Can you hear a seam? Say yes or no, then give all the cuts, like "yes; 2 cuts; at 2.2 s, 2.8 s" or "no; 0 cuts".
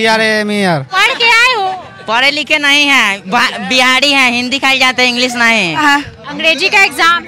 yes; 2 cuts; at 0.9 s, 5.8 s